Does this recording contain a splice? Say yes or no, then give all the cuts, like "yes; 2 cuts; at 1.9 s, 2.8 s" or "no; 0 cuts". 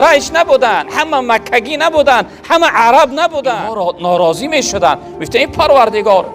yes; 1 cut; at 3.7 s